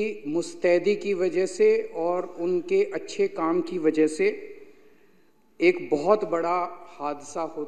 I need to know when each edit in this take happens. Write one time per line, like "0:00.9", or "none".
none